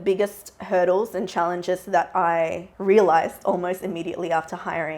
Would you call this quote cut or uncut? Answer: cut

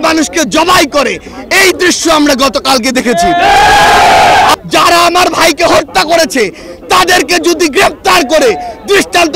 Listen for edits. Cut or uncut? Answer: cut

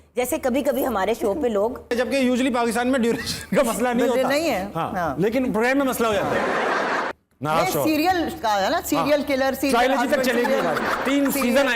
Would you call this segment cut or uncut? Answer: cut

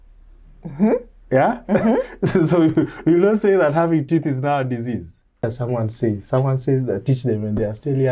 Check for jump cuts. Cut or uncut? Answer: cut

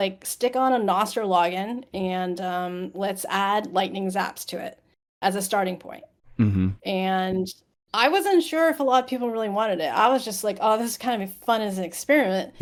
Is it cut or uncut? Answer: uncut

